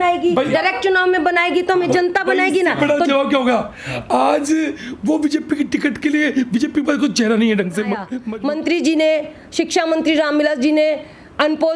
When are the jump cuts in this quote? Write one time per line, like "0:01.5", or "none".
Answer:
0:08.1